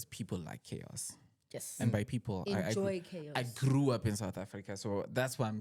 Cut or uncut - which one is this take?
uncut